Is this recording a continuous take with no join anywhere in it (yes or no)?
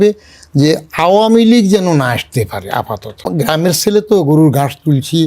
no